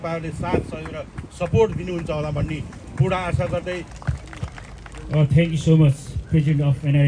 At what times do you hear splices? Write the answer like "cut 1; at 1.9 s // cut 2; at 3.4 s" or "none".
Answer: cut 1; at 3.9 s

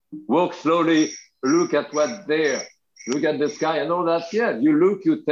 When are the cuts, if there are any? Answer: none

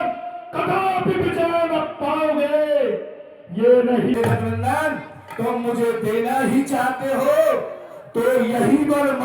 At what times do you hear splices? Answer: cut 1; at 4.2 s

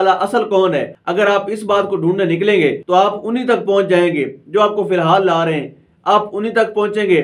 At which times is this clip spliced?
cut 1; at 1.0 s // cut 2; at 2.8 s

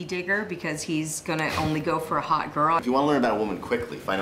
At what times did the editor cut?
cut 1; at 2.8 s

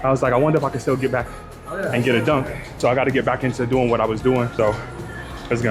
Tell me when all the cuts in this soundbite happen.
cut 1; at 2.8 s // cut 2; at 4.6 s

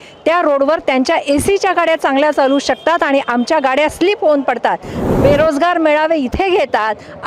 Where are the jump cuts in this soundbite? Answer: cut 1; at 5.0 s

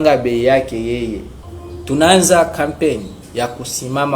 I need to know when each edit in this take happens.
cut 1; at 1.3 s

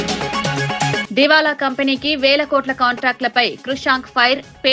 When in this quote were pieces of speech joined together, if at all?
cut 1; at 1.0 s

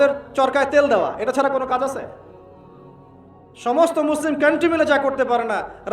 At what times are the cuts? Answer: cut 1; at 2.2 s // cut 2; at 3.5 s

